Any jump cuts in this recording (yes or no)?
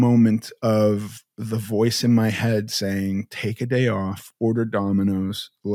no